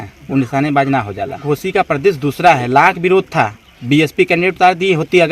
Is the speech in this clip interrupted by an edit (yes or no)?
yes